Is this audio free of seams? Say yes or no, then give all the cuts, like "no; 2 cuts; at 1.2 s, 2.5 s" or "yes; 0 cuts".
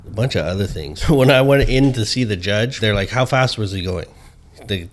no; 2 cuts; at 1.0 s, 2.7 s